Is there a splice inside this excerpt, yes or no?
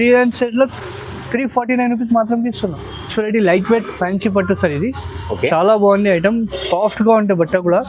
no